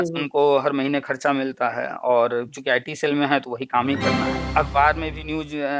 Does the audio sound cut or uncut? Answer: cut